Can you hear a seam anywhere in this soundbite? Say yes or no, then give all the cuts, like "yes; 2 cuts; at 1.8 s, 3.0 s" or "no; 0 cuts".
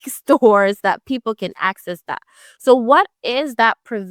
no; 0 cuts